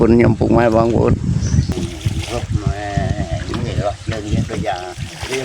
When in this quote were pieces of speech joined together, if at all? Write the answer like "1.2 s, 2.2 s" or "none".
1.7 s